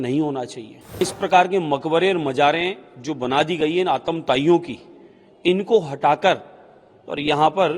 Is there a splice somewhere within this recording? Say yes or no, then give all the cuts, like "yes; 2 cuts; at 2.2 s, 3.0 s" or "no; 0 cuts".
yes; 1 cut; at 1.0 s